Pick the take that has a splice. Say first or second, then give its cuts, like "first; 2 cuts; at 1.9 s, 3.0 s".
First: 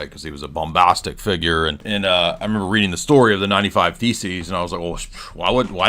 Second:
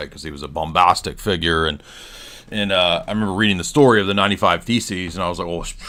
first; 1 cut; at 1.8 s